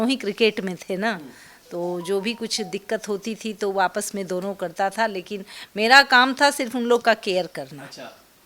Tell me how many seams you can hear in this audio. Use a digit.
0